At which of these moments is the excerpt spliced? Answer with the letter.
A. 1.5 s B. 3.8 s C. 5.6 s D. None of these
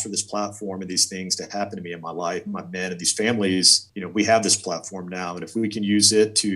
B